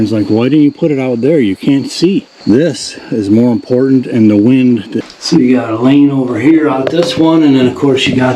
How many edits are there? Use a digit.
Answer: 2